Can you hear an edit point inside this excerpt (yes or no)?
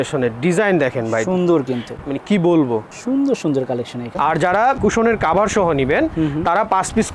yes